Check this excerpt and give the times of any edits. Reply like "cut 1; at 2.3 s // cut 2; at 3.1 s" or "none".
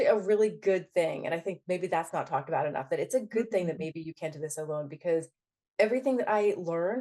none